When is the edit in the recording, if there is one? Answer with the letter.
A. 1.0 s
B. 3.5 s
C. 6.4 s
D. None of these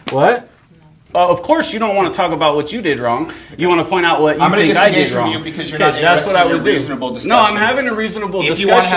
A